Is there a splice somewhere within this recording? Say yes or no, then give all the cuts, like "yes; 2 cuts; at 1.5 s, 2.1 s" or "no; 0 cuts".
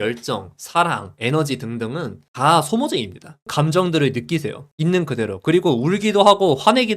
yes; 1 cut; at 3.4 s